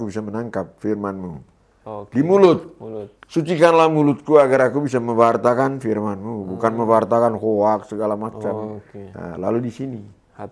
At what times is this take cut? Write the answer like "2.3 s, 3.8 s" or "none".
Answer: none